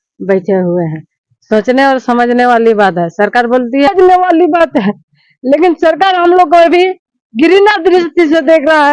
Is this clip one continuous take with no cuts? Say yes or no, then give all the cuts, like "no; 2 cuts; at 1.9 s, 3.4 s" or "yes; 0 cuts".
no; 1 cut; at 3.9 s